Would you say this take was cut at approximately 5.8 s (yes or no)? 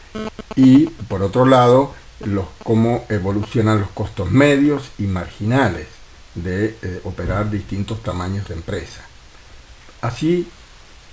no